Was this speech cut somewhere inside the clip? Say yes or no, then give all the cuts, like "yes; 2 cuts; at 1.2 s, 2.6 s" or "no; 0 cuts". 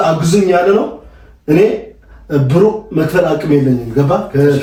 no; 0 cuts